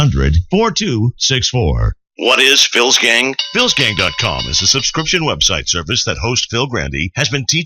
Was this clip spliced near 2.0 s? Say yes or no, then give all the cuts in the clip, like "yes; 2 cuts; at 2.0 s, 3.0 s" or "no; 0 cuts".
yes; 1 cut; at 2.0 s